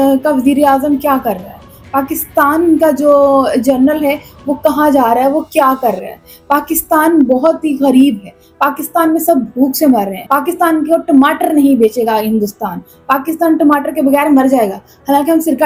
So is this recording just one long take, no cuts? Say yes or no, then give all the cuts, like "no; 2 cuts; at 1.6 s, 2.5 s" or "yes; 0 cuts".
yes; 0 cuts